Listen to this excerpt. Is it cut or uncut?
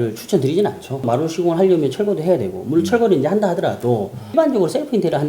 cut